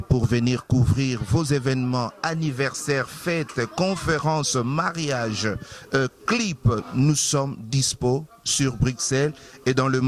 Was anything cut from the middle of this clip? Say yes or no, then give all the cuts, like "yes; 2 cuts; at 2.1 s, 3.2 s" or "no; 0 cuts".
no; 0 cuts